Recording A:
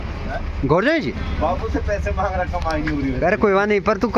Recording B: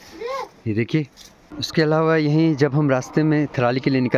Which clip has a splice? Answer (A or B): B